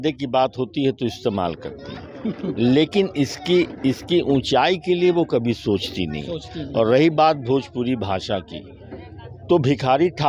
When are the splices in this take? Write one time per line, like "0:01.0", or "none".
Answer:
none